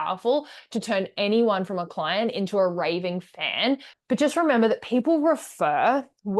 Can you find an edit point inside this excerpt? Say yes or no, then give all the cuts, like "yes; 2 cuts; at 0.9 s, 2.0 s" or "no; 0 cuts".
yes; 1 cut; at 3.9 s